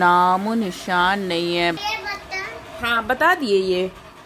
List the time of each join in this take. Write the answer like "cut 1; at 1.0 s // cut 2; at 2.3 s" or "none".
cut 1; at 1.8 s

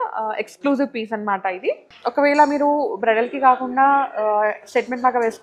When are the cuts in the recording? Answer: cut 1; at 1.9 s

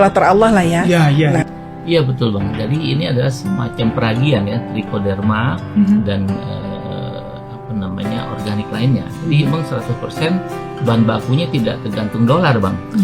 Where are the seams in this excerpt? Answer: cut 1; at 1.6 s

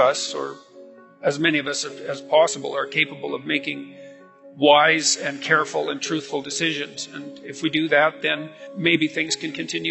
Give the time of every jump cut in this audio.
cut 1; at 8.6 s

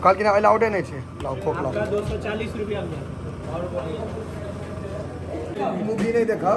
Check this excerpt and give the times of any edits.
none

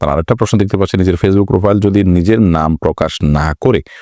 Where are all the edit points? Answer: none

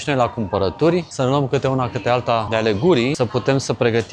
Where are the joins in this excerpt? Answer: cut 1; at 1.1 s // cut 2; at 2.5 s // cut 3; at 3.2 s

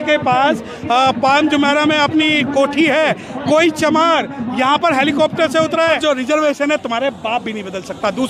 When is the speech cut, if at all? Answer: cut 1; at 6.0 s

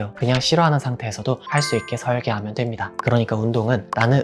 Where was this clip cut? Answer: cut 1; at 2.9 s

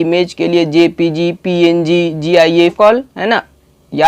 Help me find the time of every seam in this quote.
cut 1; at 2.8 s

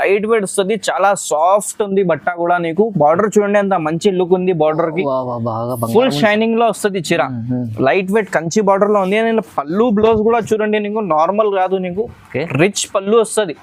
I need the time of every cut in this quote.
none

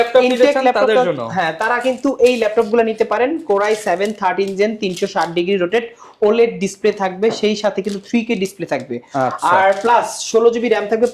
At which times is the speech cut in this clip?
none

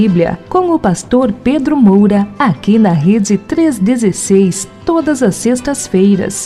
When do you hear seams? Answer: none

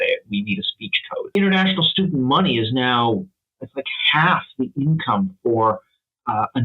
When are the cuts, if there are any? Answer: cut 1; at 1.3 s

